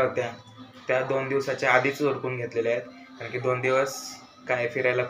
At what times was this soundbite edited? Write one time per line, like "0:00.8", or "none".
none